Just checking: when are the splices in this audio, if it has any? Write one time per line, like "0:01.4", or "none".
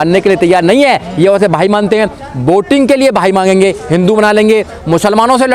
none